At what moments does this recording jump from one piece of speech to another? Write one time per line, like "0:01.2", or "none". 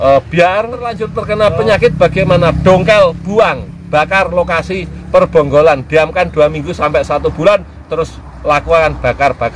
0:01.1